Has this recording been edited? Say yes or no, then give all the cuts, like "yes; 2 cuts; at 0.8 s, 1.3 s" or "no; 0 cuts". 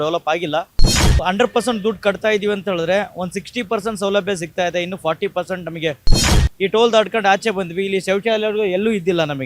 yes; 2 cuts; at 1.1 s, 6.3 s